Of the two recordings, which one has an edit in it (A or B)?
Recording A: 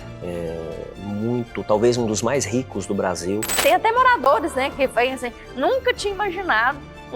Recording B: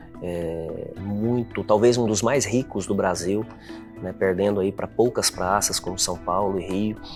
A